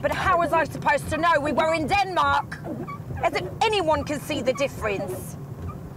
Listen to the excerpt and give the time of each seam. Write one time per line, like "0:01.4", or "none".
none